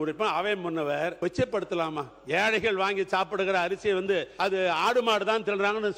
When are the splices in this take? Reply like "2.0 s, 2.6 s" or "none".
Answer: 1.1 s, 4.3 s